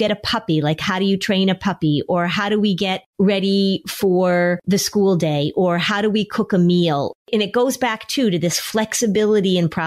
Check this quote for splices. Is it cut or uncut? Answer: cut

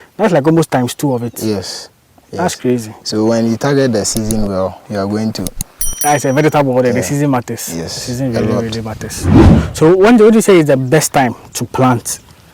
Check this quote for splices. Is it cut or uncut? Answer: cut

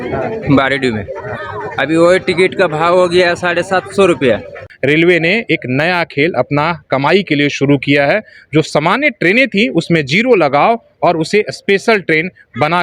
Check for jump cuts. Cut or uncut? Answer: cut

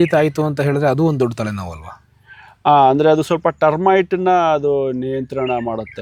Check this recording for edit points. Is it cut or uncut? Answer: uncut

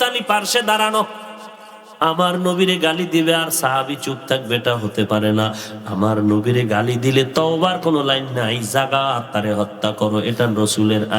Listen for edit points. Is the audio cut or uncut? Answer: uncut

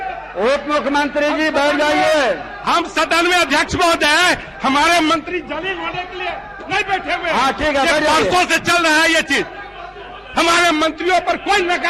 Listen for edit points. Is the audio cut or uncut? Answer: uncut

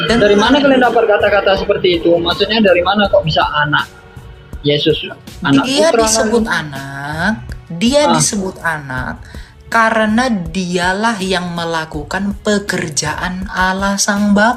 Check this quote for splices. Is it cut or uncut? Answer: uncut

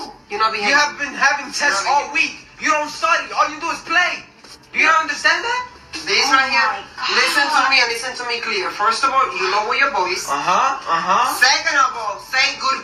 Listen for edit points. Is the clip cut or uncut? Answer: cut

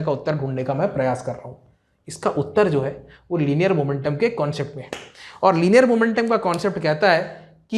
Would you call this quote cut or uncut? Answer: uncut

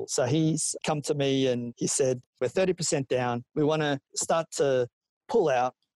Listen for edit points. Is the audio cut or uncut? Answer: cut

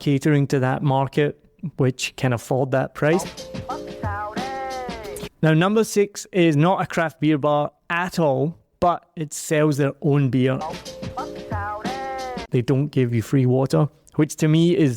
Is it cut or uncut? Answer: cut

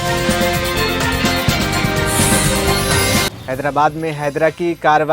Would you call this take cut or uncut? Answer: cut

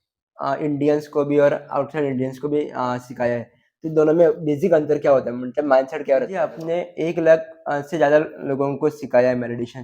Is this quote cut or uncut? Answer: cut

